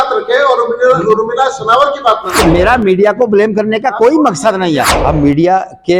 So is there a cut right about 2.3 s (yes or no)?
yes